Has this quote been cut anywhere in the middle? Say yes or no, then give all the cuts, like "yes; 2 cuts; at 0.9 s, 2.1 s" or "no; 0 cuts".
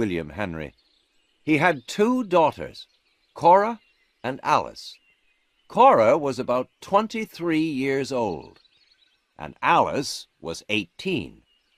no; 0 cuts